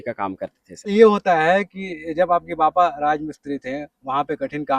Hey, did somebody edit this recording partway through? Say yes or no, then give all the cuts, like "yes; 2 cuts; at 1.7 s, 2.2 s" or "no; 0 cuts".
yes; 1 cut; at 0.9 s